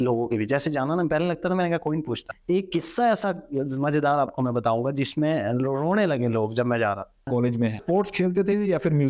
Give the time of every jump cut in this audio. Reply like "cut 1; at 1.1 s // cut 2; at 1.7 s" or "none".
cut 1; at 2.3 s // cut 2; at 7.7 s